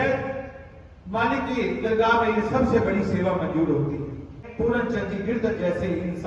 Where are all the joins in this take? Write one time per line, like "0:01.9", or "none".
0:04.4

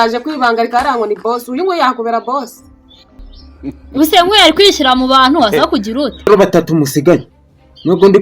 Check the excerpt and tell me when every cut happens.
0:06.3

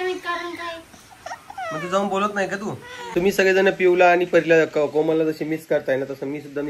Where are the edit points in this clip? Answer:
0:02.9

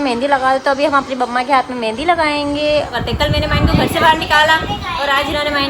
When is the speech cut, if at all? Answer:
0:02.9

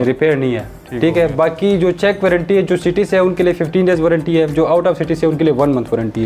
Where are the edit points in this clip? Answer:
none

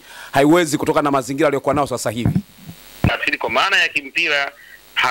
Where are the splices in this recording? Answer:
0:03.1

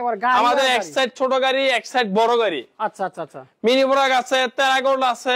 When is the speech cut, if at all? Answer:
none

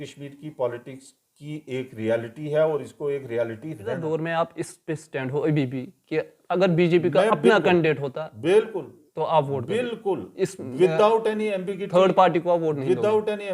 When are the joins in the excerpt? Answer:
0:04.0

